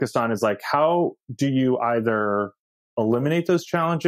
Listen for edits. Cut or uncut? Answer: uncut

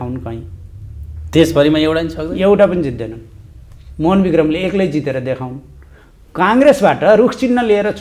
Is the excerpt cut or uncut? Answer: uncut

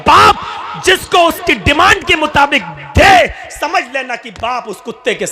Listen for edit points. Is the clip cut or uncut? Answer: uncut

